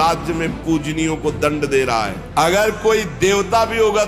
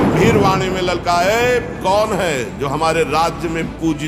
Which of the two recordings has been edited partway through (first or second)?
first